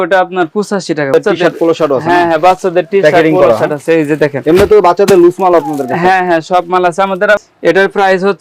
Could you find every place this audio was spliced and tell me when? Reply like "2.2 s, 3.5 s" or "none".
1.1 s, 7.4 s

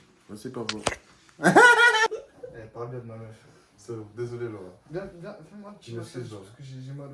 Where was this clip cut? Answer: 2.1 s

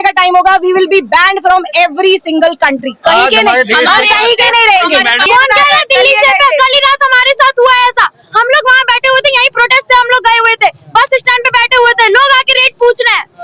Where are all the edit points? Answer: 5.2 s

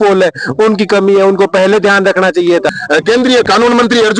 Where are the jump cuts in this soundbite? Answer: 2.8 s

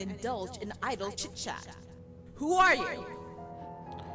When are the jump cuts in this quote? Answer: 3.0 s

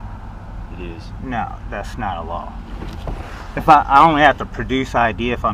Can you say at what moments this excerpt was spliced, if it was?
none

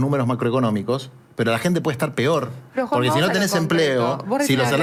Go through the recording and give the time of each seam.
none

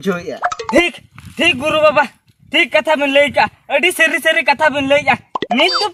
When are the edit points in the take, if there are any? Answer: none

